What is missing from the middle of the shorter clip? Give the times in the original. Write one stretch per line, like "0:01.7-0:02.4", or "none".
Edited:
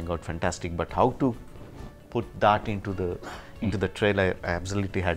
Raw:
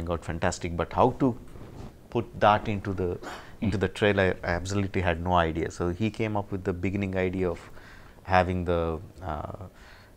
none

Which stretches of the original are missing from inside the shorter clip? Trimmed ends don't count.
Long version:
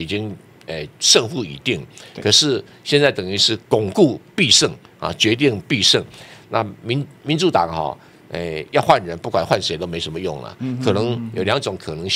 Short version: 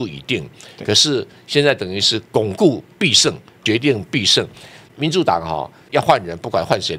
0:04.9-0:05.1
0:06.4-0:07.1
0:08.1-0:08.6

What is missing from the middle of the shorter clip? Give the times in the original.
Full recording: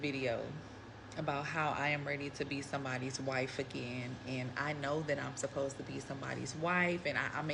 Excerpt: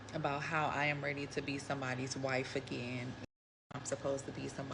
0:04.7-0:05.2

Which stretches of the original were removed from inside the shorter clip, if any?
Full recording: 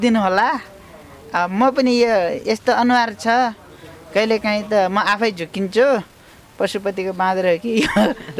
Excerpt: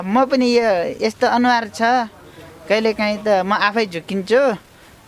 none

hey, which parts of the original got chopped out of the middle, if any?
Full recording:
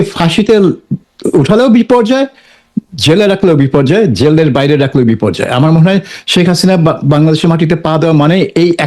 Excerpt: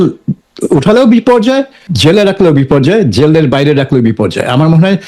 0:02.5-0:02.9

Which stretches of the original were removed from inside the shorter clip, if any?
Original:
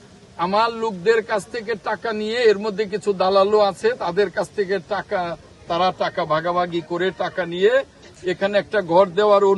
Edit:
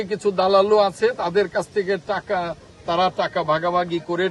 none

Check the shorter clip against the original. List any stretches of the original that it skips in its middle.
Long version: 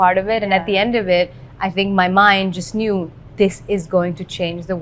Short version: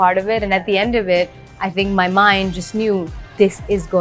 none

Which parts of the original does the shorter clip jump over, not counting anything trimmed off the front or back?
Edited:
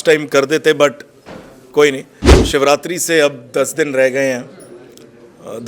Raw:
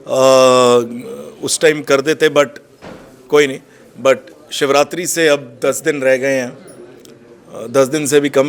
0:03.8-0:04.4

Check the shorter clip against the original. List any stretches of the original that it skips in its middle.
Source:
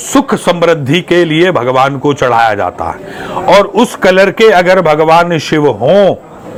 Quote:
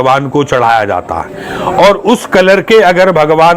none

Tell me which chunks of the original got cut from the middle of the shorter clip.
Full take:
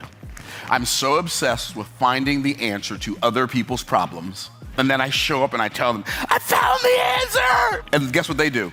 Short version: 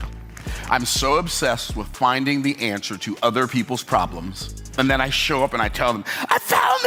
none

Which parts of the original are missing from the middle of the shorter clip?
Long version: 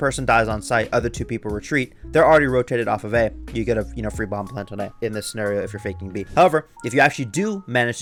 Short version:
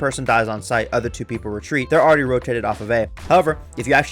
0:01.8-0:02.1
0:03.4-0:06.2

